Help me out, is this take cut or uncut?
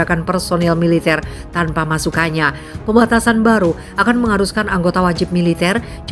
uncut